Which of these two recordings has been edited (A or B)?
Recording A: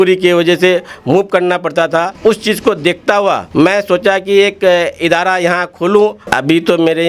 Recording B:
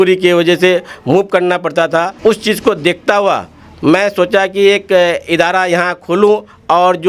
A